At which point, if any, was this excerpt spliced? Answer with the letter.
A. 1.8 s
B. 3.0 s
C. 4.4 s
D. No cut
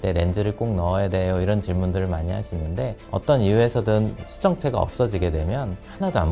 B